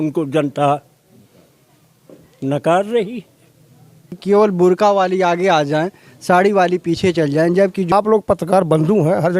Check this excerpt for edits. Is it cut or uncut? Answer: cut